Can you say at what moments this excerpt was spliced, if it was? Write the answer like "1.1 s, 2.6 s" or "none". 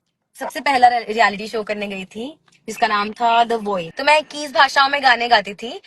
3.9 s